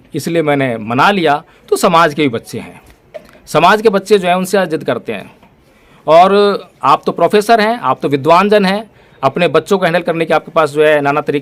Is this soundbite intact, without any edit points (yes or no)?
yes